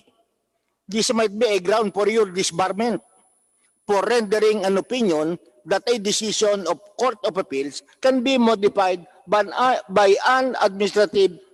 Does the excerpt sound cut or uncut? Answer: uncut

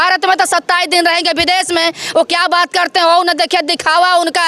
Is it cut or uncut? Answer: uncut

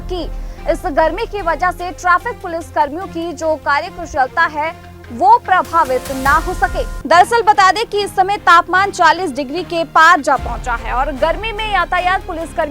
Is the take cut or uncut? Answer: cut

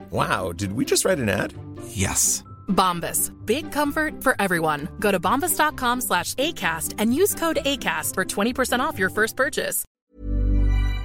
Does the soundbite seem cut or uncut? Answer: cut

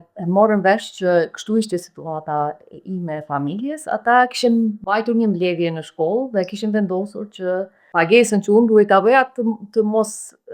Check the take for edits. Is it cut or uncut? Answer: cut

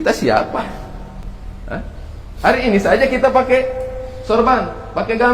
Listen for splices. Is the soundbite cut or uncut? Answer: cut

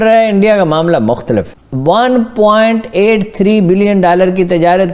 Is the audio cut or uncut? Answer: cut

